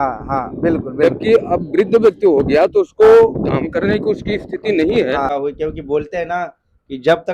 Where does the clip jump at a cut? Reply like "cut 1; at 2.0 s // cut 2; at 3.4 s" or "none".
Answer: cut 1; at 5.3 s